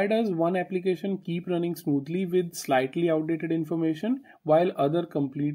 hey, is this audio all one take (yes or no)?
yes